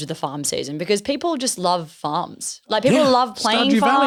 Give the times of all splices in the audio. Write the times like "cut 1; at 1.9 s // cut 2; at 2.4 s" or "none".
none

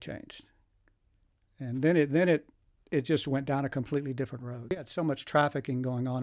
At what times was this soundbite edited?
cut 1; at 4.9 s

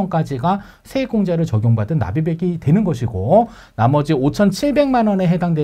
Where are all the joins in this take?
none

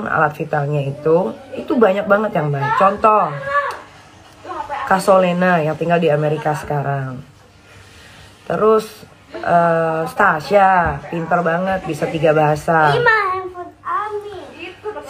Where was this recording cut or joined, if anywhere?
none

